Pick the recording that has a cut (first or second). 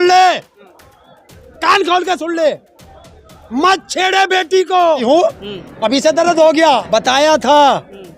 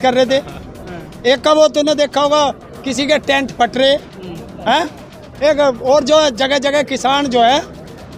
first